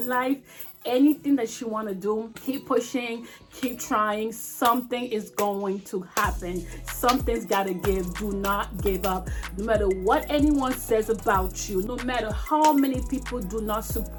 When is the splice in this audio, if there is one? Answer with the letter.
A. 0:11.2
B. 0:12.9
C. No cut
C